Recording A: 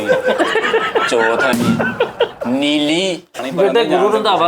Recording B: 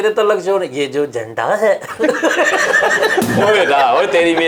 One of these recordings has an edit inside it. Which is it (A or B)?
A